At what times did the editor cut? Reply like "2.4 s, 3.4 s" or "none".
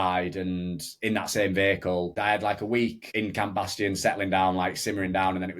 2.1 s, 3.0 s